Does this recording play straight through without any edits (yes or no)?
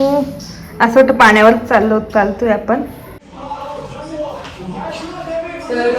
no